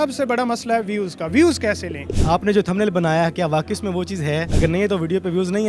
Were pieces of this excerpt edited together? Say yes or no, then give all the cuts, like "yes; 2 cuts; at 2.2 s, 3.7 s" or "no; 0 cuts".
yes; 1 cut; at 2.0 s